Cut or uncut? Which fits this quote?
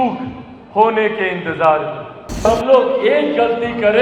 cut